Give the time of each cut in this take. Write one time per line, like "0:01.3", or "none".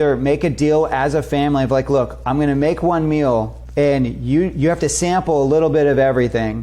0:03.6